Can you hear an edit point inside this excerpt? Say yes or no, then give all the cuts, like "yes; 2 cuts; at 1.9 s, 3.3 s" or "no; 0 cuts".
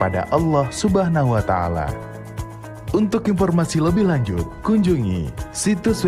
yes; 1 cut; at 5.2 s